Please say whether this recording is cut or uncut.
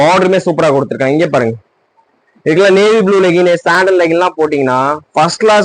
uncut